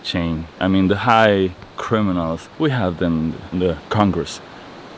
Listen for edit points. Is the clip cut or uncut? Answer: cut